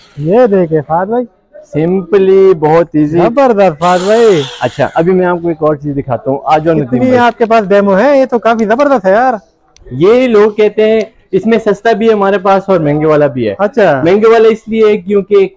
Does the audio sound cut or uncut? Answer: uncut